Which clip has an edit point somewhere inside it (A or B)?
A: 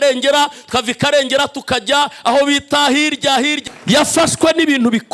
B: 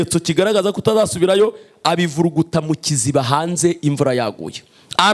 A